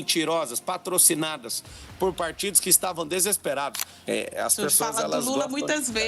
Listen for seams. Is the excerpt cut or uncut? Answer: cut